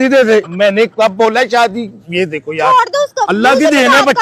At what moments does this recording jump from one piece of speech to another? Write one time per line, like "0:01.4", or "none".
none